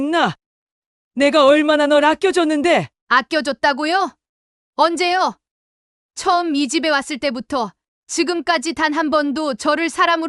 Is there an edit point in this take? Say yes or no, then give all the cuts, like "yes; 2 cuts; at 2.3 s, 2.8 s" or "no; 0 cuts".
no; 0 cuts